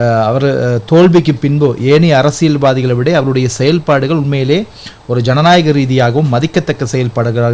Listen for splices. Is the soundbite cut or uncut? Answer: uncut